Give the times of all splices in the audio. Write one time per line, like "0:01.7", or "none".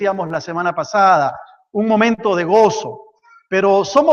0:02.5